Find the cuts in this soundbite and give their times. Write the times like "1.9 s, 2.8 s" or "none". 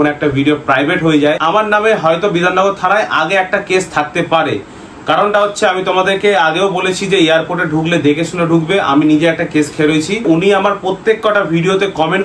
1.4 s, 10.2 s